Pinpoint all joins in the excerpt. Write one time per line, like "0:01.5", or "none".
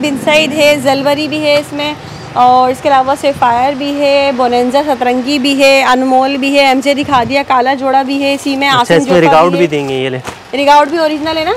none